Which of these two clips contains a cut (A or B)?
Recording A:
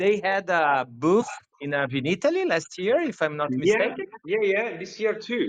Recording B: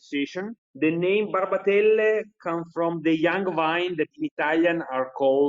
B